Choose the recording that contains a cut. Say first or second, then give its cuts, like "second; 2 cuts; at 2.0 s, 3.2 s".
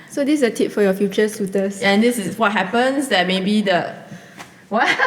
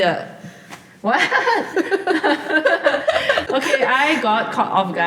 second; 1 cut; at 3.4 s